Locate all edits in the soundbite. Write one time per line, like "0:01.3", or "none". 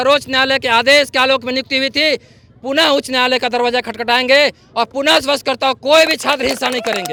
none